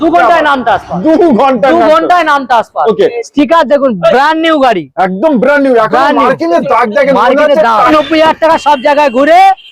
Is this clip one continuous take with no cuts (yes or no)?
no